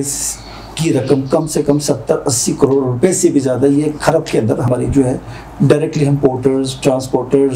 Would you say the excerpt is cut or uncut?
cut